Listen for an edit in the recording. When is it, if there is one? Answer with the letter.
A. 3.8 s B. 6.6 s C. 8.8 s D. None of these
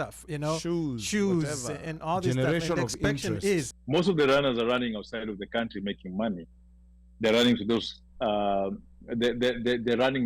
A